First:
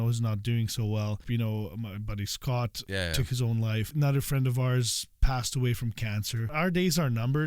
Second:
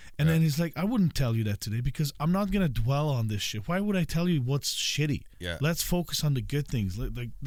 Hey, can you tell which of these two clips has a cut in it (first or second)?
first